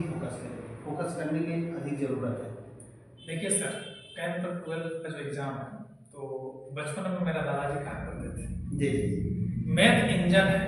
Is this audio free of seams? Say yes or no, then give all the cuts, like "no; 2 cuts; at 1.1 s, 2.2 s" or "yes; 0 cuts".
yes; 0 cuts